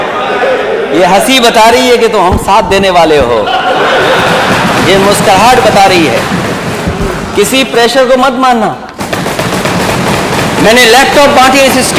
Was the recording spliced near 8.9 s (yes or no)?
yes